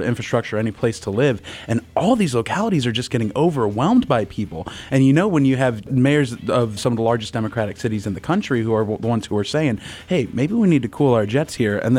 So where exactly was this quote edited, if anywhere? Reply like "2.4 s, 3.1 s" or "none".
5.9 s, 6.8 s